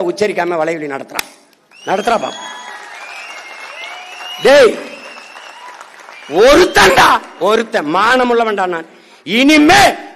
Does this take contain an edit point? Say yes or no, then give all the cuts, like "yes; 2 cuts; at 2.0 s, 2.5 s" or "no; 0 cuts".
no; 0 cuts